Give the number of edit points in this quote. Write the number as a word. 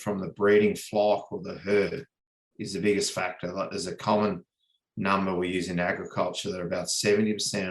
zero